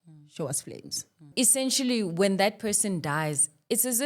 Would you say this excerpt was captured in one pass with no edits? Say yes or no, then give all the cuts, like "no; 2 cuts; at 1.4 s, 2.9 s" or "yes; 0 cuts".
no; 1 cut; at 1.3 s